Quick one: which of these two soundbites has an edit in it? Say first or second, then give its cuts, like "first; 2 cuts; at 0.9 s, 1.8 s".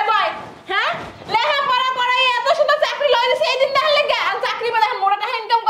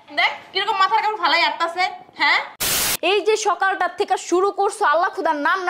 second; 1 cut; at 2.8 s